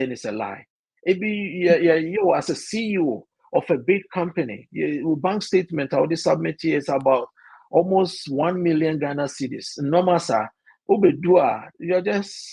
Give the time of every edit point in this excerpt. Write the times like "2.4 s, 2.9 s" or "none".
none